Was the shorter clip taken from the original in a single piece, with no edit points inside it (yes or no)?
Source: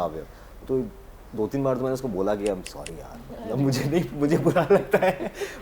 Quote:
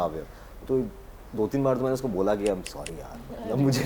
yes